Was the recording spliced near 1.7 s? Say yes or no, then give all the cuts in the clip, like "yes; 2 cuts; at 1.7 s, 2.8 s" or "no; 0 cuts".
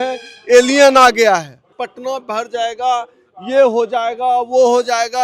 yes; 1 cut; at 1.7 s